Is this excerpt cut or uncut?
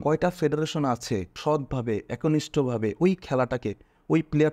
cut